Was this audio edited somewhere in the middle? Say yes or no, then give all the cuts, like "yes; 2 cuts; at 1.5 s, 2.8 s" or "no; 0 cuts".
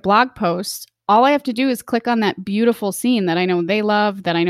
no; 0 cuts